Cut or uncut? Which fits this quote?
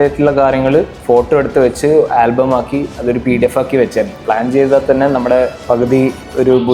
cut